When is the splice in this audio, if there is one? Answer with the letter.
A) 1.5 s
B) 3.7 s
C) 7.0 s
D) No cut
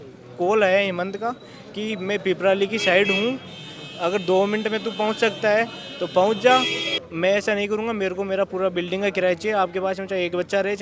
C